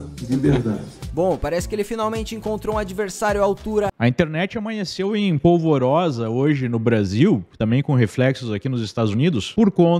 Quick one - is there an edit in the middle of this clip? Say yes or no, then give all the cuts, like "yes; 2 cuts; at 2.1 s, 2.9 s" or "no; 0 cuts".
yes; 1 cut; at 3.9 s